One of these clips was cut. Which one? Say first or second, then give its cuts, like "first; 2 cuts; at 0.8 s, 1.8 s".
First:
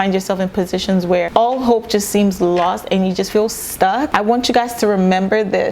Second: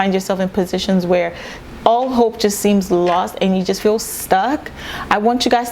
first; 2 cuts; at 1.3 s, 4.1 s